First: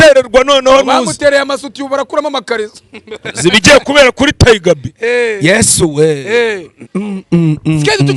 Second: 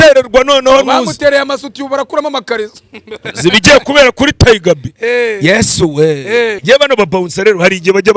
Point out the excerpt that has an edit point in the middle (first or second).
second